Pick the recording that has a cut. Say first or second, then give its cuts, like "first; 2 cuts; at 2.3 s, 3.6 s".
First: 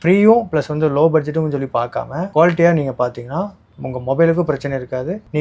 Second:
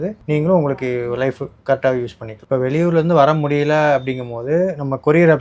second; 1 cut; at 2.3 s